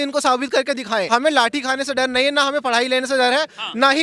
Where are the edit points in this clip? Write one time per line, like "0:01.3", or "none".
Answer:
0:01.1